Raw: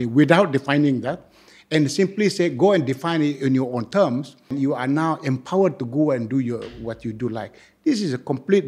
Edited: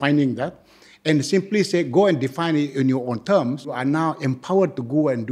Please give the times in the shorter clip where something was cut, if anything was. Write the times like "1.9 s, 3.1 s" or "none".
3.7 s